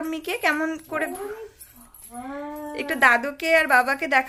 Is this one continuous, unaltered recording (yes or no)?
yes